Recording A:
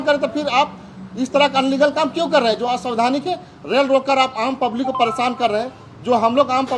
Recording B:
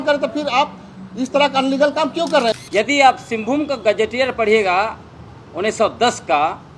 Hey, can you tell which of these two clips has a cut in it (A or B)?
B